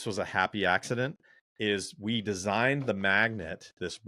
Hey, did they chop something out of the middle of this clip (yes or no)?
no